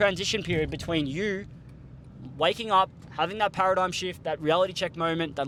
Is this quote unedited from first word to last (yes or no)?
yes